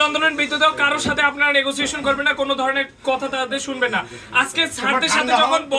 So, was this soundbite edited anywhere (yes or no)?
no